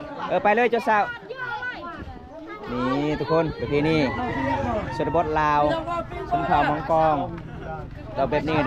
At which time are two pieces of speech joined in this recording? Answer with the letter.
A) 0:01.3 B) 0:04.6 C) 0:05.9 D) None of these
D